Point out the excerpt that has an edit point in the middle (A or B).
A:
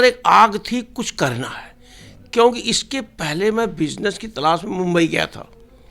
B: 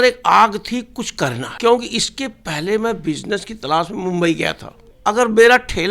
B